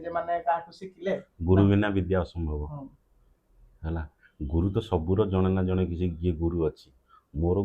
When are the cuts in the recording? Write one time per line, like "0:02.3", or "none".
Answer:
none